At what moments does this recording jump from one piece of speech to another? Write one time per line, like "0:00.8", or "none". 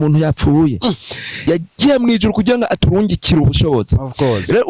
0:01.4